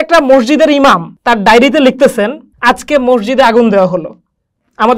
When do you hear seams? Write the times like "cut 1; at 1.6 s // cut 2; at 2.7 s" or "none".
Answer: cut 1; at 1.1 s // cut 2; at 2.5 s